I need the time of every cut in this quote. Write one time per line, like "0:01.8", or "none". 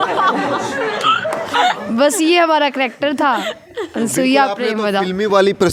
none